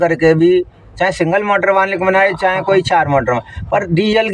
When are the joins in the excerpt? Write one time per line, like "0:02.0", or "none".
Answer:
none